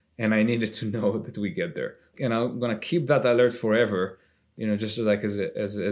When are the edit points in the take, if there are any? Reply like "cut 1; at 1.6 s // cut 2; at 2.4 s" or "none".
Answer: cut 1; at 2.1 s